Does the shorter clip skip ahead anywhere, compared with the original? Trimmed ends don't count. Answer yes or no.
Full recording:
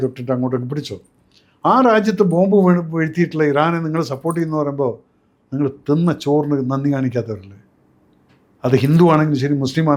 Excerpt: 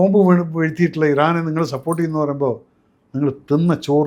no